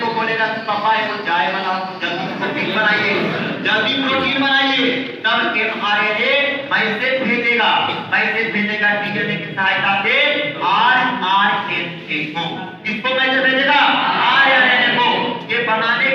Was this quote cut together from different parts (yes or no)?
no